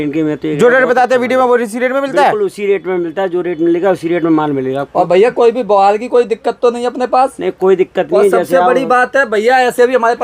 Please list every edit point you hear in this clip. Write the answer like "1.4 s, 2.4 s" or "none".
none